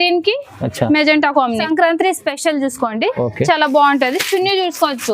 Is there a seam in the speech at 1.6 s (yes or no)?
yes